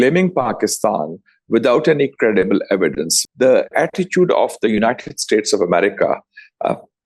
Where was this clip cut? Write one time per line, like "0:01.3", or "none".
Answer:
0:03.1